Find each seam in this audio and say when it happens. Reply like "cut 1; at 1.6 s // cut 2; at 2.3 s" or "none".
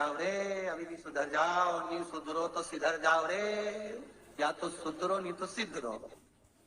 none